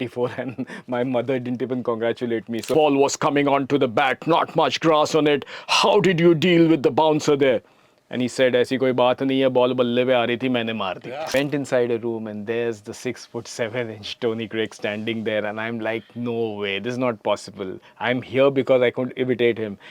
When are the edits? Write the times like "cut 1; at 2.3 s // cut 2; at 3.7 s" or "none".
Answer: cut 1; at 2.7 s // cut 2; at 11.3 s